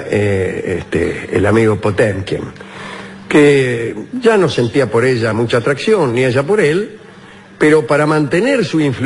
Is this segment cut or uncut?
cut